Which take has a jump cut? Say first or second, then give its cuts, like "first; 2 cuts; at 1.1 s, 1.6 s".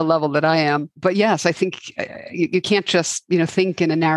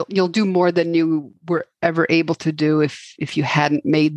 first; 2 cuts; at 0.9 s, 3.2 s